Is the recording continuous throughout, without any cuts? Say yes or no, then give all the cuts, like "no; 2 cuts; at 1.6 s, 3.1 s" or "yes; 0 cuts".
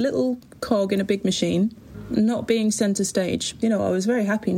no; 2 cuts; at 1.9 s, 3.5 s